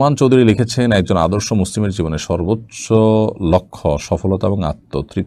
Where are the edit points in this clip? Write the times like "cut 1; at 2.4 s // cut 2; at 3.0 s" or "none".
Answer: none